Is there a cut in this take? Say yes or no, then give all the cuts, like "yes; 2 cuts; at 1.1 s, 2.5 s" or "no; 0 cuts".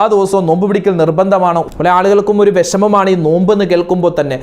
yes; 1 cut; at 1.6 s